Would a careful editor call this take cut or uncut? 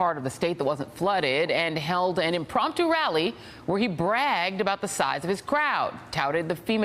cut